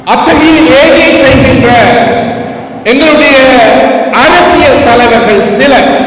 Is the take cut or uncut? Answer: uncut